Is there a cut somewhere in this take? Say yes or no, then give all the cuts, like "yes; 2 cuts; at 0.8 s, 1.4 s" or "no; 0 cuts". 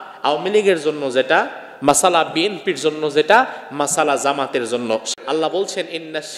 yes; 1 cut; at 5.1 s